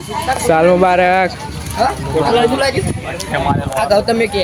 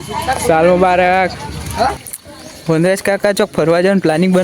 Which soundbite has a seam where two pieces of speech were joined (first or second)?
second